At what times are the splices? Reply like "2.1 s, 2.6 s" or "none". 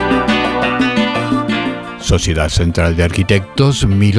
1.9 s